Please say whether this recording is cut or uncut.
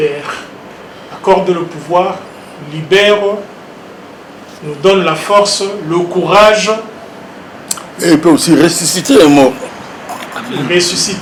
uncut